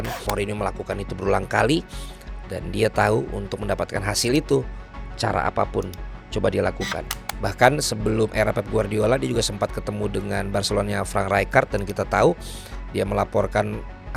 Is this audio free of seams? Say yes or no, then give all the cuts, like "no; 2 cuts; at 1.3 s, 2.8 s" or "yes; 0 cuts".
yes; 0 cuts